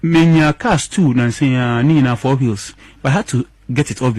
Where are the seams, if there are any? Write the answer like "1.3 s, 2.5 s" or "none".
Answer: none